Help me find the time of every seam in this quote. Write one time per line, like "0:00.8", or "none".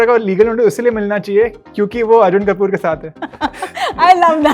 none